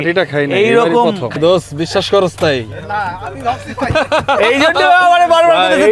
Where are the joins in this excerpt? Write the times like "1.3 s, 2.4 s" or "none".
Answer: 1.3 s